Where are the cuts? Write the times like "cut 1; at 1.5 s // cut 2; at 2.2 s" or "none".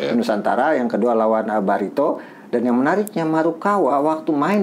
none

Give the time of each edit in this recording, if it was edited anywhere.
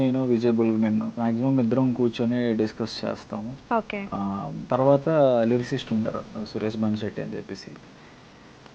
cut 1; at 1.1 s // cut 2; at 4.6 s

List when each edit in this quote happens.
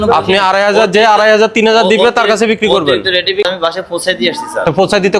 cut 1; at 3.4 s

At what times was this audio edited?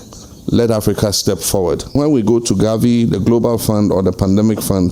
cut 1; at 1.9 s

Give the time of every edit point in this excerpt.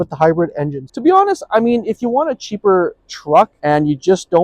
cut 1; at 0.9 s

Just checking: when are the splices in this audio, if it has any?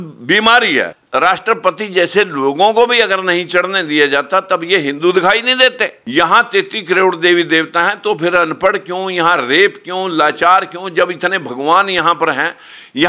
cut 1; at 1.0 s // cut 2; at 6.0 s

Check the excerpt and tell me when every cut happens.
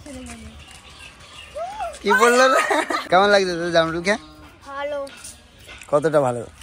cut 1; at 3.0 s

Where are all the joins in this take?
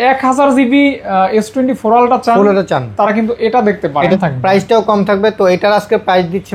cut 1; at 4.1 s

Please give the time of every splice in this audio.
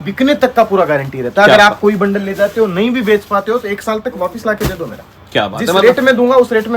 none

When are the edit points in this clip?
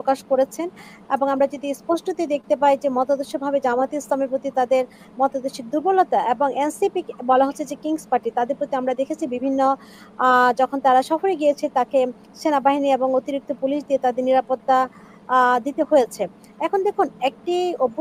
none

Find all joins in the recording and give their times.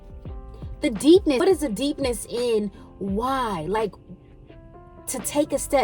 cut 1; at 1.4 s

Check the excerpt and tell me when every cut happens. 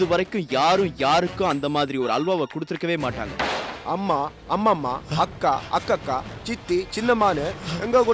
cut 1; at 3.5 s

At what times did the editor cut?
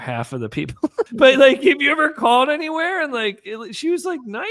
cut 1; at 1.0 s

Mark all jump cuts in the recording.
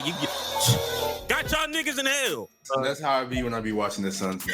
cut 1; at 2.6 s

